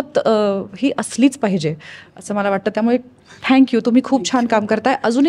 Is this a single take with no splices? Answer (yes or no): yes